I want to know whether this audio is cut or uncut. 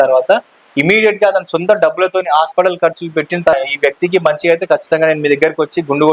cut